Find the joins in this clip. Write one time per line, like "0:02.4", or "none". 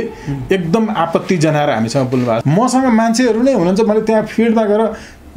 0:02.4